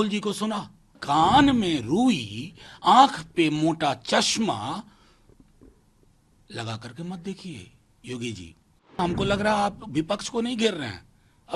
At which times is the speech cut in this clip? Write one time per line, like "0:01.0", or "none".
0:01.0
0:09.0

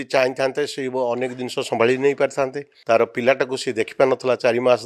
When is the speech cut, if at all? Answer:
0:02.7

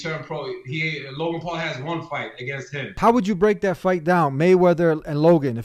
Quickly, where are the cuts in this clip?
0:03.0

